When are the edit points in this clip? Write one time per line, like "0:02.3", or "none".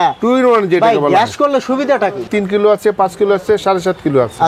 0:02.3